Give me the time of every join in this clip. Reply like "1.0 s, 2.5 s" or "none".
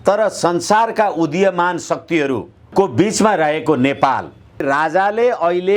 2.6 s, 4.6 s